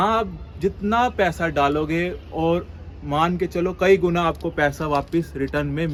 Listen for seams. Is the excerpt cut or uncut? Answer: uncut